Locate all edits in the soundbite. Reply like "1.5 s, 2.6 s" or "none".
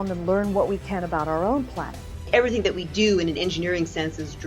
2.3 s